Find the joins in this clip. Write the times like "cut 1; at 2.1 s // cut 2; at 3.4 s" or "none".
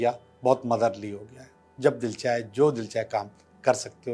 cut 1; at 1.6 s